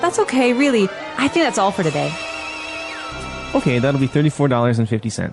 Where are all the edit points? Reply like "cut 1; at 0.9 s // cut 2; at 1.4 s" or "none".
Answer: cut 1; at 3.1 s